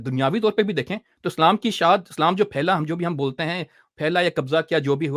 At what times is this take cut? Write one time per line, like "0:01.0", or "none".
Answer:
none